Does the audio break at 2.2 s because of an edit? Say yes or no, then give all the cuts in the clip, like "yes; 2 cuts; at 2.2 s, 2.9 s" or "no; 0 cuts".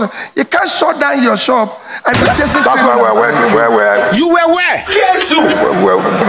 yes; 1 cut; at 2.2 s